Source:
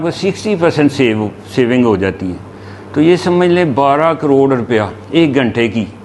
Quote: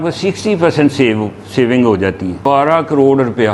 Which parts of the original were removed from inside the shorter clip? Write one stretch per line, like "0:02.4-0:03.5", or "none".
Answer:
0:02.4-0:03.7